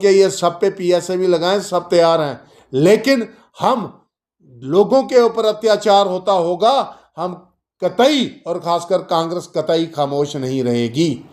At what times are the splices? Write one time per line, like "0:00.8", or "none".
none